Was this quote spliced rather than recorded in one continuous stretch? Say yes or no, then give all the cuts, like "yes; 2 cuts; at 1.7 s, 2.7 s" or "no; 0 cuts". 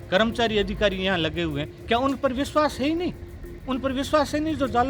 no; 0 cuts